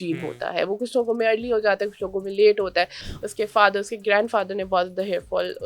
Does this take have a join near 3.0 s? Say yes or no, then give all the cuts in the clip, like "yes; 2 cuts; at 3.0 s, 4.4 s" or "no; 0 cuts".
yes; 1 cut; at 3.0 s